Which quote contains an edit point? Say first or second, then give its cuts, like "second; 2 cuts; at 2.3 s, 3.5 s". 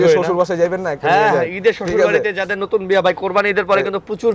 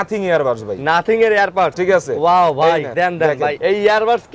second; 2 cuts; at 1.8 s, 3.1 s